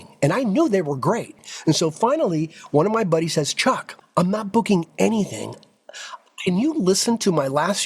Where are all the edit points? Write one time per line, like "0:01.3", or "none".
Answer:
0:01.3
0:03.9